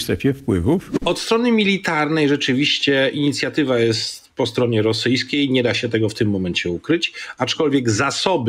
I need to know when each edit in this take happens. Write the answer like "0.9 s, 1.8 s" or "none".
0.9 s